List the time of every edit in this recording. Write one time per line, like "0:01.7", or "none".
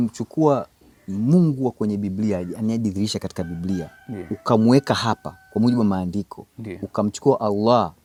none